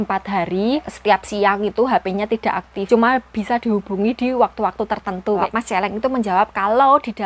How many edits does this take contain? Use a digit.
3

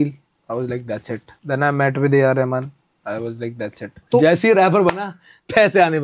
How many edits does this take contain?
2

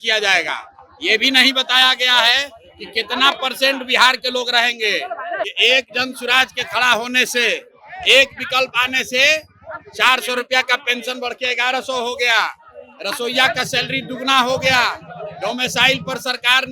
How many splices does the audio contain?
1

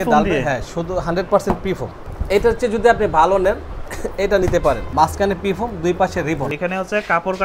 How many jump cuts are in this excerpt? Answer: 3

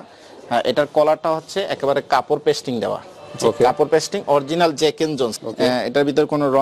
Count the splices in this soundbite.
1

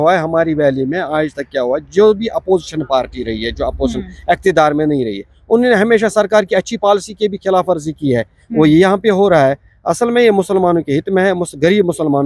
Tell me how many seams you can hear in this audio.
0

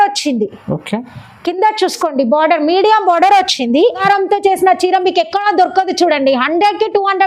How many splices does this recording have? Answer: 1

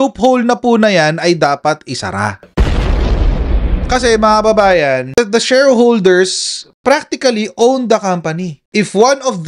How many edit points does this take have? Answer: 1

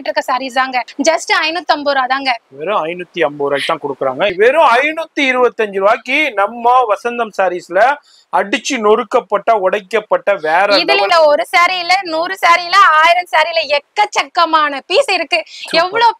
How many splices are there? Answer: 3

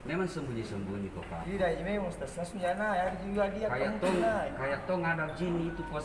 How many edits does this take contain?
0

